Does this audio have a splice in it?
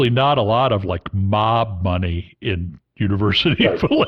no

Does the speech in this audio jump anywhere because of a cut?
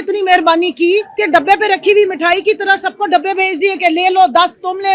yes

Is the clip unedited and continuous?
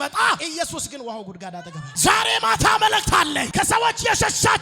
no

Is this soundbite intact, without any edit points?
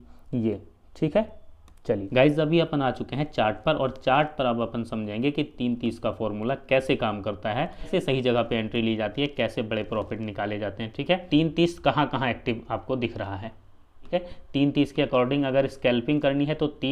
no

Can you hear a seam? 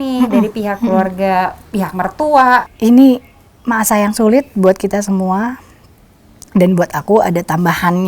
yes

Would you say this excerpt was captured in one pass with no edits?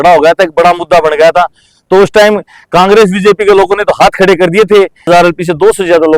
no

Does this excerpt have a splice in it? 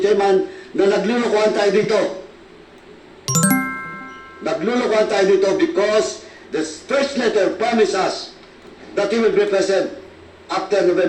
no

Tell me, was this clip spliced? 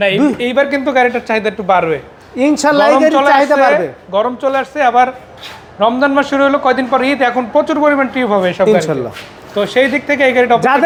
no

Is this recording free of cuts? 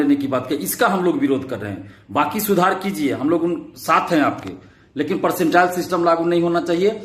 yes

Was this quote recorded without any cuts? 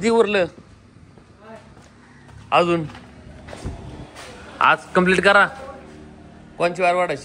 yes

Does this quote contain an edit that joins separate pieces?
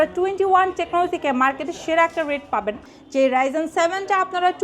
yes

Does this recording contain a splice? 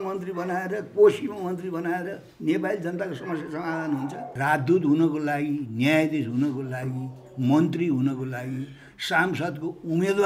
yes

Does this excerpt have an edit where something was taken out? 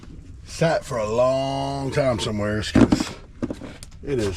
yes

